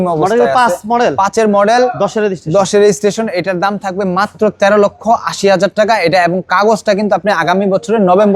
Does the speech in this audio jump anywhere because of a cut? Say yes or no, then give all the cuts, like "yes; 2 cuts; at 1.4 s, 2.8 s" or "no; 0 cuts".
no; 0 cuts